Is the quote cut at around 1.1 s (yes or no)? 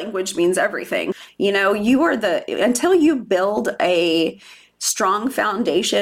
yes